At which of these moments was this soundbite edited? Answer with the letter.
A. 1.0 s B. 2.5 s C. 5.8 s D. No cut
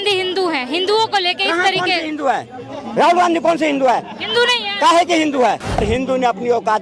C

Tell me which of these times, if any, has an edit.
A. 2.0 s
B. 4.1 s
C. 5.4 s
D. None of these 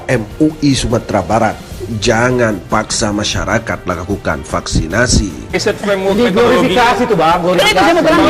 C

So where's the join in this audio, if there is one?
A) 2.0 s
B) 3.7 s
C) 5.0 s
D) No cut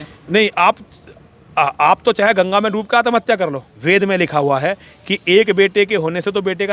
B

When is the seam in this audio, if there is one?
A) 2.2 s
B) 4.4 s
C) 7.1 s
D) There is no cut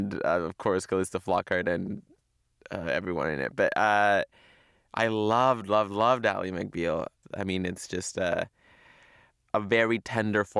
C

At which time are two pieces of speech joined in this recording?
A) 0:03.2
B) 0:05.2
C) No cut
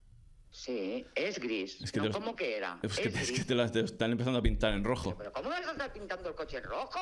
B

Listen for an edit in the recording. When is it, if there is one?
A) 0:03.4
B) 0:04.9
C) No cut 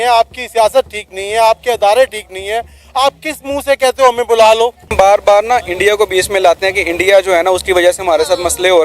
B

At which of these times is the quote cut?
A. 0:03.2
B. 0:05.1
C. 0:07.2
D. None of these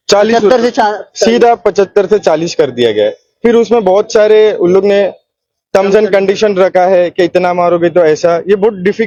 D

